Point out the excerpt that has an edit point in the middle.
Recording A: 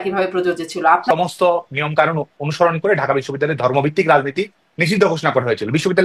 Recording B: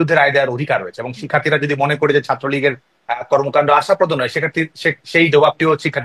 A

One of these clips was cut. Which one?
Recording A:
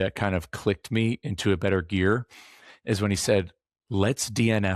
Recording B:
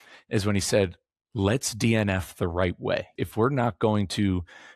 B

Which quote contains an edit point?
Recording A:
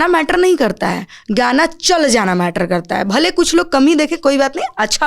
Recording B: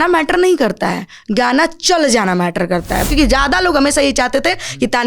B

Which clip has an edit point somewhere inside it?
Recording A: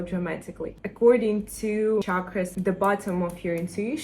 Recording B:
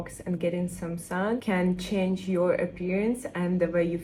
A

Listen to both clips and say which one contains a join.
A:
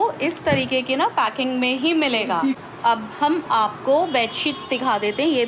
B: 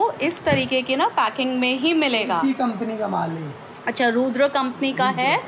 A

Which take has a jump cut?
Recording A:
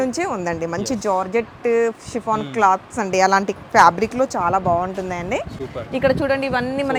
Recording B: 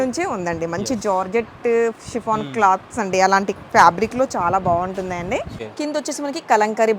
B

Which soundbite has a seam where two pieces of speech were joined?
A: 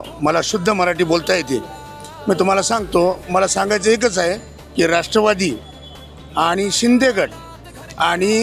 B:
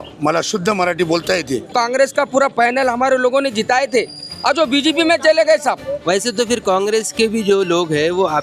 B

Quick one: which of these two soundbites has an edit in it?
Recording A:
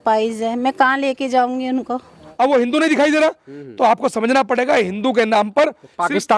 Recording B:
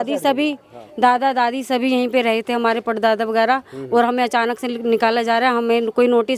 A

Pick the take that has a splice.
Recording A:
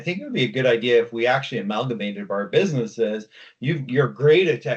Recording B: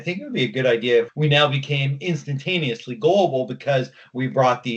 B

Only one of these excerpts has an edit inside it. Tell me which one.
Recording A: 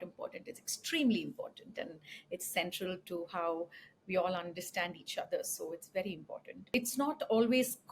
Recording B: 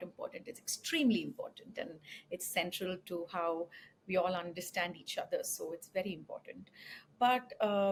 A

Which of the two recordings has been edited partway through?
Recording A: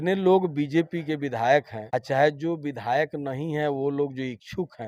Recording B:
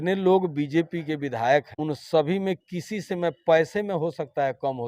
B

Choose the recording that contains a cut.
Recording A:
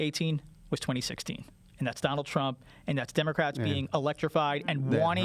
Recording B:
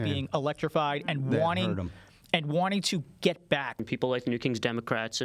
B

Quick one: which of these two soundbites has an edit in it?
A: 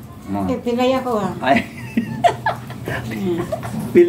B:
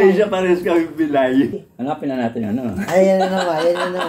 B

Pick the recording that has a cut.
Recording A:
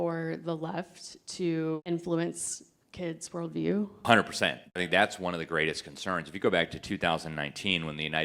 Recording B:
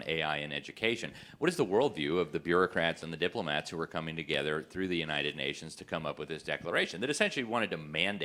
A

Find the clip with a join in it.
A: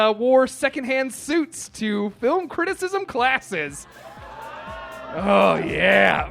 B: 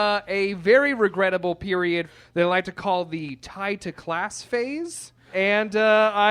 B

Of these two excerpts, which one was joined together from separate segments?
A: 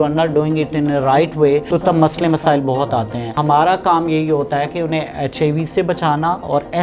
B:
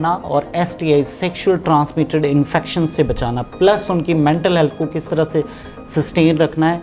A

